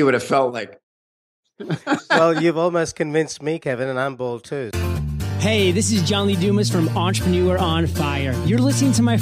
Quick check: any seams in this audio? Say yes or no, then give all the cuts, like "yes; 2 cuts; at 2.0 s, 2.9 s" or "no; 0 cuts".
yes; 1 cut; at 4.7 s